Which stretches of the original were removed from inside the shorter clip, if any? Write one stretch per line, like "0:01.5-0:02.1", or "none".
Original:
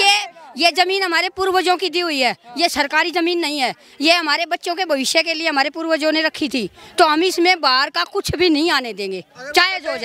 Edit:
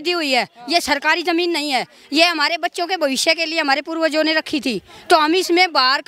none

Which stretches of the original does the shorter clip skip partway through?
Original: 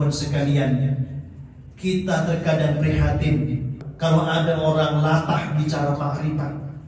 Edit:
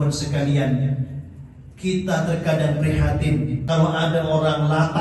0:03.6-0:03.9

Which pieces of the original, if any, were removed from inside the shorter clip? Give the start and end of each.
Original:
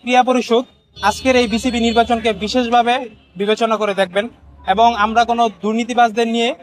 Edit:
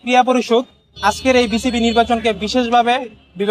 none

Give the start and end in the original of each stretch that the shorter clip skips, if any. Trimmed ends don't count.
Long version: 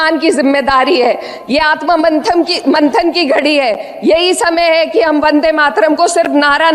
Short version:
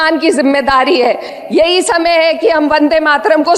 0:01.3-0:03.9

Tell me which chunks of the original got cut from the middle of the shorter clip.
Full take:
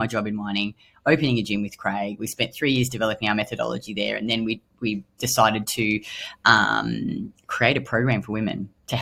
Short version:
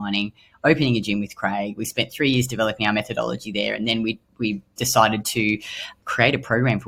0:06.3-0:07.3

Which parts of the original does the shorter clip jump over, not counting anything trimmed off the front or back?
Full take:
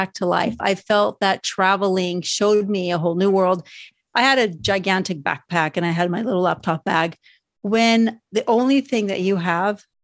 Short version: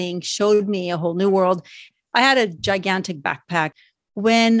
0:05.7-0:07.2

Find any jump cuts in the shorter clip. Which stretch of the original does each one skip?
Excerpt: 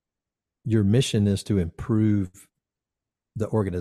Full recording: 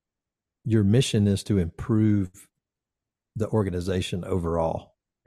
none

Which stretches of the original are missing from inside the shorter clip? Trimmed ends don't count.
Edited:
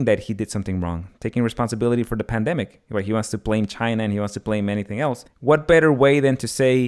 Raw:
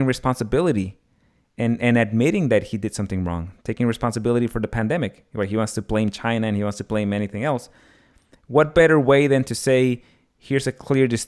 0:07.7-0:08.4

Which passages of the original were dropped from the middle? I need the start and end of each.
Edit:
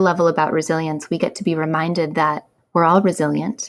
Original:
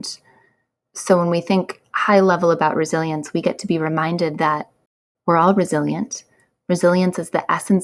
0:04.8-0:05.0

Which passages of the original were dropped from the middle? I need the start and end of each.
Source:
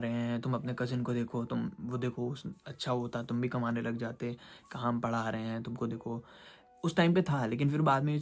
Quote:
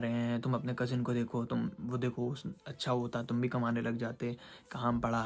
none

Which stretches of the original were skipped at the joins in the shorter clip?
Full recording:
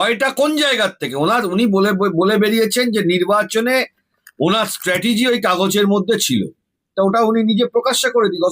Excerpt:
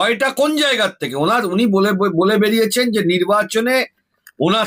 none

